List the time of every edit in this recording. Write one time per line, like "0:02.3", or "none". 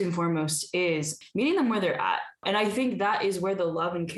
0:01.1
0:02.4